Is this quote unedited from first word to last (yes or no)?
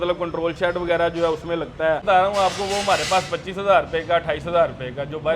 no